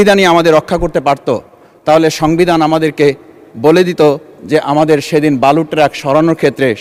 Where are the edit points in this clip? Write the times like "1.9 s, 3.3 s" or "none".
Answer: none